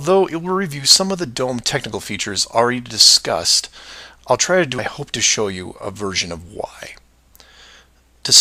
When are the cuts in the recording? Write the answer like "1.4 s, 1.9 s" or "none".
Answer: none